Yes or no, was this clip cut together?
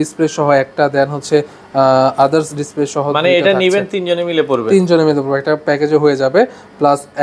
no